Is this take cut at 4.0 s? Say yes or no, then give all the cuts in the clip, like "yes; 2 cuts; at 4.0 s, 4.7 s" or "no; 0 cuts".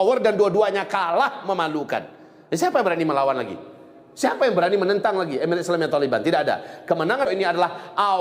no; 1 cut; at 7.3 s